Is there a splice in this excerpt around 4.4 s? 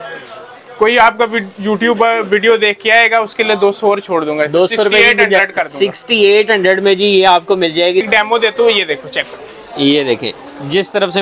no; 1 cut; at 8.1 s

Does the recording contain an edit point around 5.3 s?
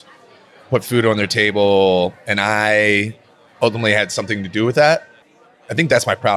yes; 1 cut; at 5.3 s

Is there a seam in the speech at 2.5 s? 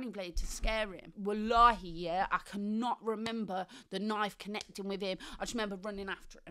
no; 1 cut; at 1.0 s

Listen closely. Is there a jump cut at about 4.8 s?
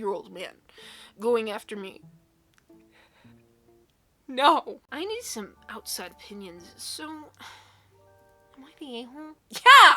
yes; 1 cut; at 4.8 s

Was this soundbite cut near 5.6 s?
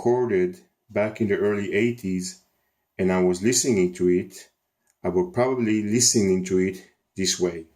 yes; 1 cut; at 5.6 s

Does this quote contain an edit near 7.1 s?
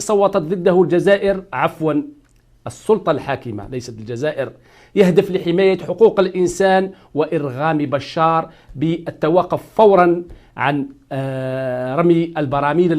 yes; 1 cut; at 7.1 s

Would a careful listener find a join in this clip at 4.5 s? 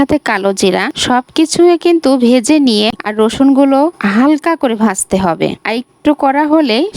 no; 1 cut; at 3.0 s

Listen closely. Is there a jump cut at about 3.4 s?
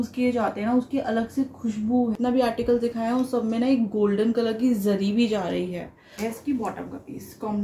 no; 2 cuts; at 2.1 s, 6.3 s

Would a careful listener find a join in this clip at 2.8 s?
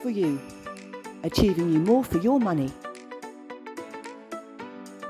yes; 1 cut; at 2.8 s

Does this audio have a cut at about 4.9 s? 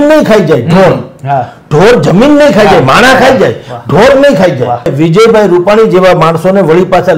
yes; 1 cut; at 4.9 s

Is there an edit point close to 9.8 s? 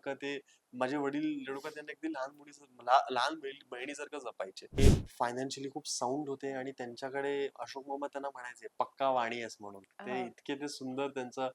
no; 1 cut; at 4.8 s

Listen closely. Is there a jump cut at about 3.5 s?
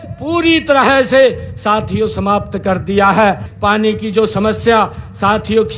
yes; 1 cut; at 3.5 s

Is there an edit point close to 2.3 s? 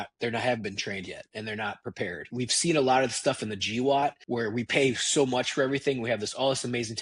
yes; 2 cuts; at 2.3 s, 4.2 s

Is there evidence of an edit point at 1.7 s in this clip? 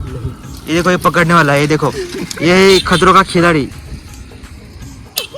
no; 1 cut; at 3.8 s

